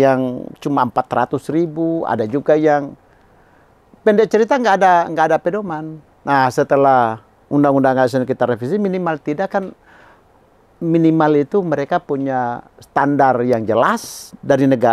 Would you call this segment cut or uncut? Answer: uncut